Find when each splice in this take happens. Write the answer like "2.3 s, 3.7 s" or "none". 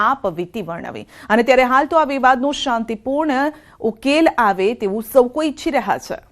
2.8 s